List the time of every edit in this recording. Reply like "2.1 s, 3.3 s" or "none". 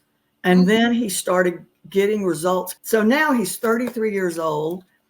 2.7 s